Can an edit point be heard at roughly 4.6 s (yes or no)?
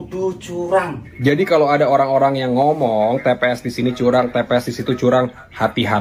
no